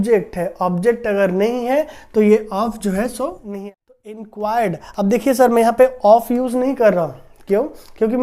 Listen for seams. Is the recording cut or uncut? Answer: cut